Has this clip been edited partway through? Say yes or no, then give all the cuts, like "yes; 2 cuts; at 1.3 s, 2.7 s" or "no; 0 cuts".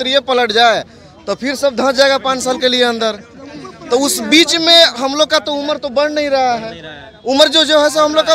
no; 0 cuts